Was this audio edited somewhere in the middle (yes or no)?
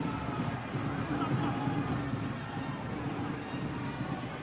no